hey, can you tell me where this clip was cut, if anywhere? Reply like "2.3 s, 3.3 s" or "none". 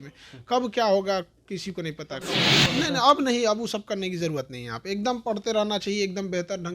2.6 s